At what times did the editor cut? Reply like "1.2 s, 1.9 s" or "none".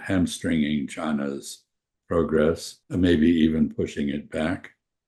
2.7 s